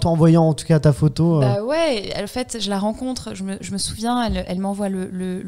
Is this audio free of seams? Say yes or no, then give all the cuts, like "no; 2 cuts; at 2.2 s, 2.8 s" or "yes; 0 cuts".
no; 1 cut; at 1.5 s